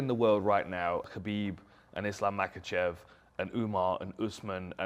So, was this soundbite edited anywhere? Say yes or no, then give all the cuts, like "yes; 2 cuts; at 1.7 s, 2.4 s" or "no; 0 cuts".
yes; 1 cut; at 1.1 s